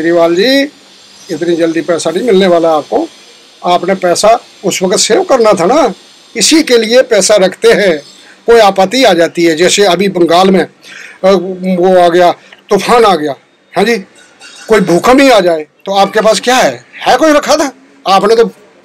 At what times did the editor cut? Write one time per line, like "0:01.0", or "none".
0:13.5